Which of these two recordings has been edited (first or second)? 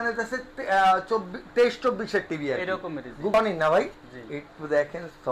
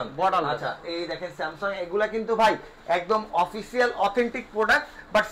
first